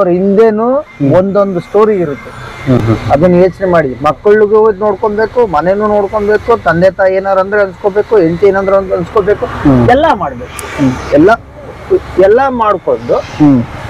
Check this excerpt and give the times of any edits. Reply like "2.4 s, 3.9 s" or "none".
none